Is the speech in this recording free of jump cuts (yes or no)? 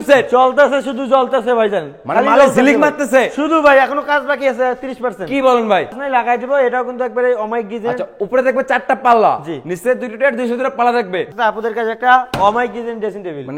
no